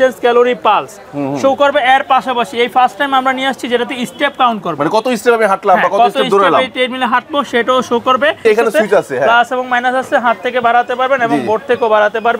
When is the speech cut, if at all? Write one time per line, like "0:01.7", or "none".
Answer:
0:08.4